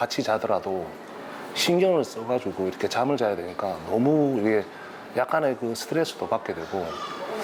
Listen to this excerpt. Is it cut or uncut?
uncut